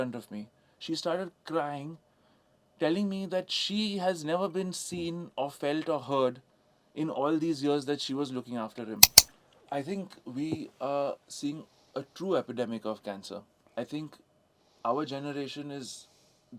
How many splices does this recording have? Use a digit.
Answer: 1